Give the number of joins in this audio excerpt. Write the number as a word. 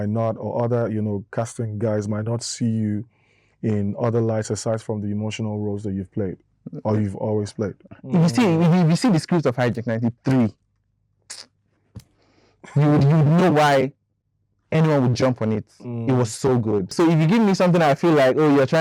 two